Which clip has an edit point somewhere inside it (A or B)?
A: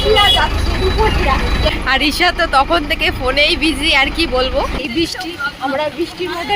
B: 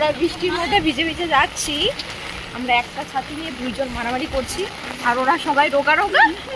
A